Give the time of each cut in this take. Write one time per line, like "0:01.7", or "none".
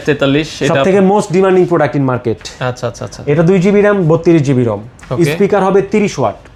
none